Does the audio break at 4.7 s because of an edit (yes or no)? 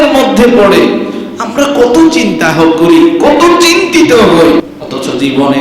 yes